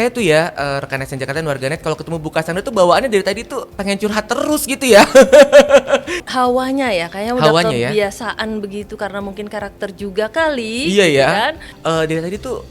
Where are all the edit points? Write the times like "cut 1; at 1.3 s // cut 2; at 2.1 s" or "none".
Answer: cut 1; at 6.2 s // cut 2; at 11.7 s

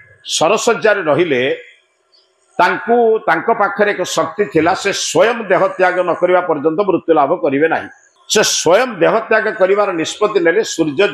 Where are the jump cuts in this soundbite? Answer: none

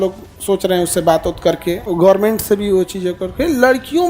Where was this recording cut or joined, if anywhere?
cut 1; at 1.8 s

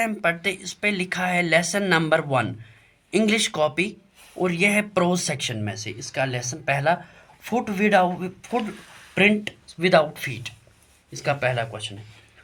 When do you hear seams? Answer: none

